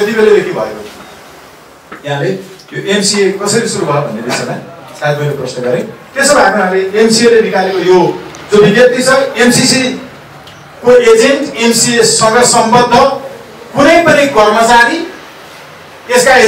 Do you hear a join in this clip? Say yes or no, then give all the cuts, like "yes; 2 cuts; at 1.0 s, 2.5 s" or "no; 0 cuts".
no; 0 cuts